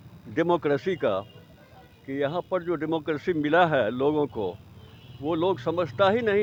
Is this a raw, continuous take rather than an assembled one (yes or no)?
yes